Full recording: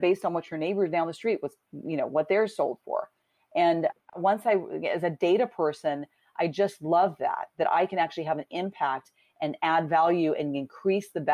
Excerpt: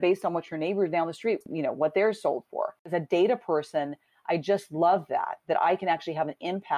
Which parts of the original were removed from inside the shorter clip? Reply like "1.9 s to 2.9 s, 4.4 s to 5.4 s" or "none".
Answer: 1.5 s to 1.8 s, 3.2 s to 5.0 s